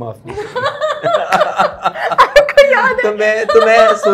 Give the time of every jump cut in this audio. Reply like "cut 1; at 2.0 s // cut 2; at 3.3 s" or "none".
none

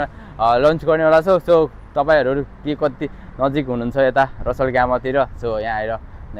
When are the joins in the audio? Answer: none

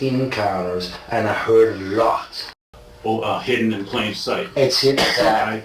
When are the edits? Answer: cut 1; at 2.6 s

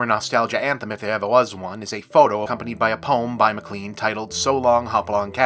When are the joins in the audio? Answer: cut 1; at 2.5 s

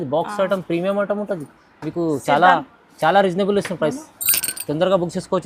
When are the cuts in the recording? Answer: none

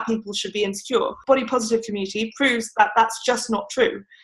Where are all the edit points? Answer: cut 1; at 1.2 s

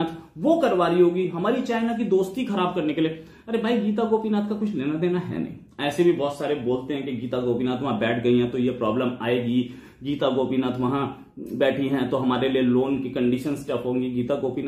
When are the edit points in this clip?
none

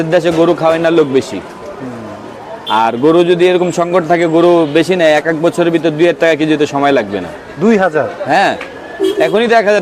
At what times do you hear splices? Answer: none

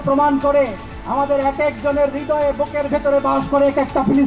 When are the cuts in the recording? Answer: none

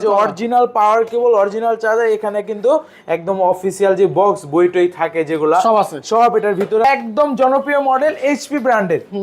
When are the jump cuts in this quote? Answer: cut 1; at 6.8 s

